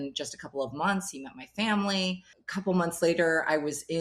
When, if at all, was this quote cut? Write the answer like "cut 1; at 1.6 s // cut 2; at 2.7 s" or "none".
cut 1; at 2.2 s